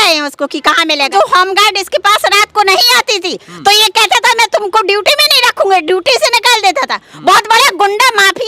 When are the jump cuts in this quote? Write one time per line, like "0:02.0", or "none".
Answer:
0:01.1